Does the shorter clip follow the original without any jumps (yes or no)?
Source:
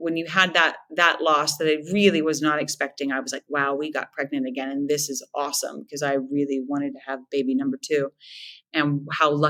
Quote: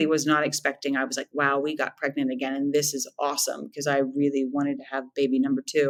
yes